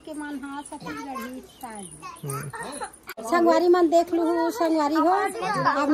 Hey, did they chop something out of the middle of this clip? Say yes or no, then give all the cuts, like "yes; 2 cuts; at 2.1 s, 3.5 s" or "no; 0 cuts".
yes; 1 cut; at 3.2 s